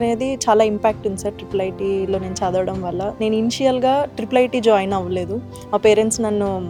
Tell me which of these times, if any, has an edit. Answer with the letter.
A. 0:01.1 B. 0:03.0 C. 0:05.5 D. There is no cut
D